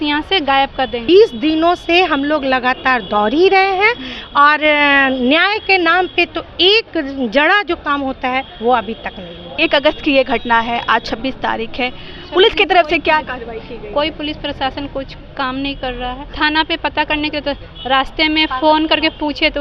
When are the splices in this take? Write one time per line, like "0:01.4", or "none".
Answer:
0:01.0
0:09.5
0:16.2